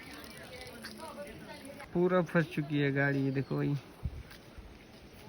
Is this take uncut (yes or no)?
no